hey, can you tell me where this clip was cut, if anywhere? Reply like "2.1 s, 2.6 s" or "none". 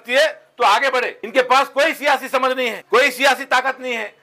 1.2 s, 2.8 s

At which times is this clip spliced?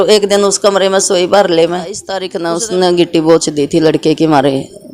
2.3 s

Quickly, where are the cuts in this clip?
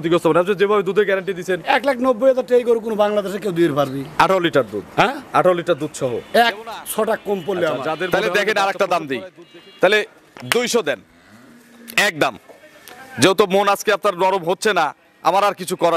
8.1 s

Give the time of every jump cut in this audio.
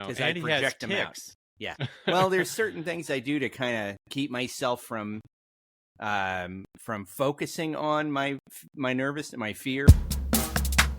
9.9 s

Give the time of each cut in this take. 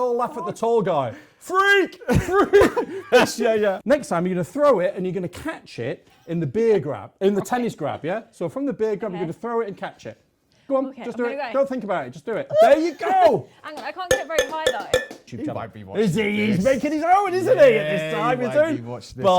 3.8 s, 15.2 s

